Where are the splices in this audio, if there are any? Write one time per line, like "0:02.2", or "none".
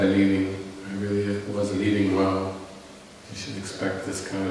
0:02.0